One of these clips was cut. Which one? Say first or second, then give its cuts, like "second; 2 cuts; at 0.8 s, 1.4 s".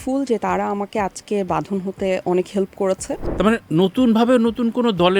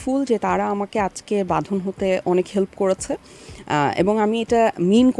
first; 1 cut; at 3.2 s